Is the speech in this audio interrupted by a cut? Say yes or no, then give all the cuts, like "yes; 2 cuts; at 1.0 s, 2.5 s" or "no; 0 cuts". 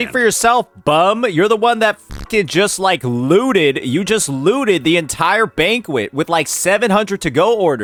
no; 0 cuts